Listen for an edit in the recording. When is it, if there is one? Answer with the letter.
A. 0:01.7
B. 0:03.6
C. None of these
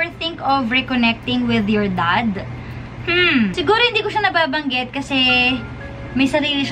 C